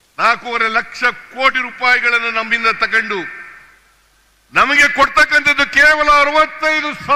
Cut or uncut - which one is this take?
uncut